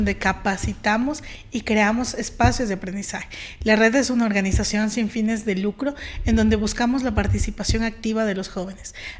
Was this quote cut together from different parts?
no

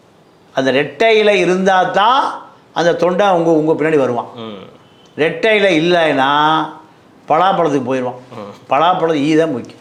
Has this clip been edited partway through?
no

